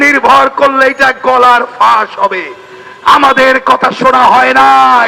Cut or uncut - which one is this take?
uncut